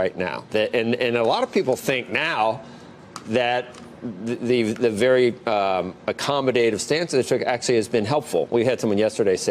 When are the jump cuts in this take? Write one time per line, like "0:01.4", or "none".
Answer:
0:03.9